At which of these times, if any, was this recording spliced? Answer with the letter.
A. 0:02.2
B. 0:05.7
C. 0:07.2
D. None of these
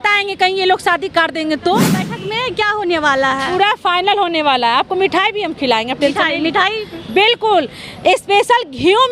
A